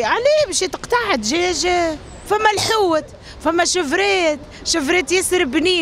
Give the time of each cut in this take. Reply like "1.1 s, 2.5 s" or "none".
2.1 s